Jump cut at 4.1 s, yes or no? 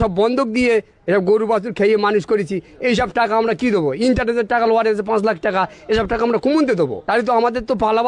no